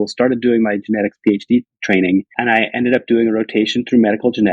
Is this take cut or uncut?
cut